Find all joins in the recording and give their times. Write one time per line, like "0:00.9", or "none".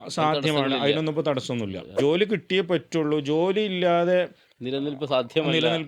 0:01.9